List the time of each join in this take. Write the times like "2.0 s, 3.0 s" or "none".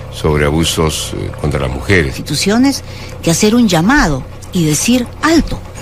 none